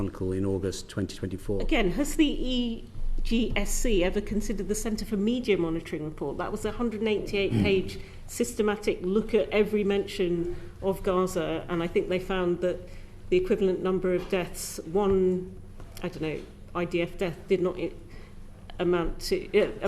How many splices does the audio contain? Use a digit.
1